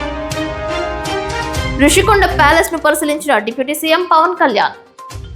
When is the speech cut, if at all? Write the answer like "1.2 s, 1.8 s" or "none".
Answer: none